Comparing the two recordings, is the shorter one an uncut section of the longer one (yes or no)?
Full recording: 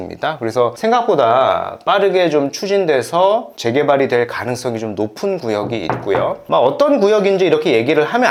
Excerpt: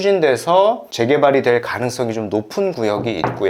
yes